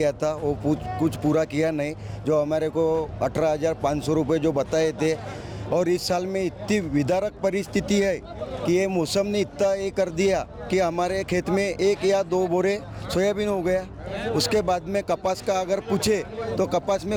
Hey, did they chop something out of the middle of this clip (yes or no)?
no